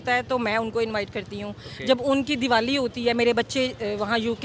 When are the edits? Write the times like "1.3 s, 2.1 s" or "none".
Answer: none